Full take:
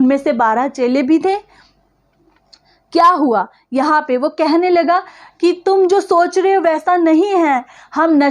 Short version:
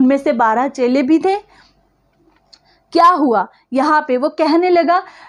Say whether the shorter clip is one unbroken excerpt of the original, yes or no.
yes